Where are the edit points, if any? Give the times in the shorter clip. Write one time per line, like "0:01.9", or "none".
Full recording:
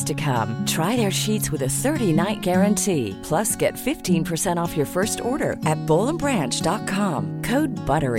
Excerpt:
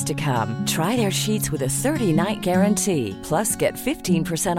none

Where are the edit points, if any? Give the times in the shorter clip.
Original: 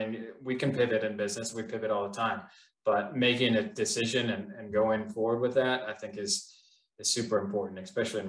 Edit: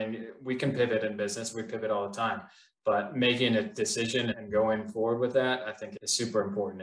0:04.4
0:05.8

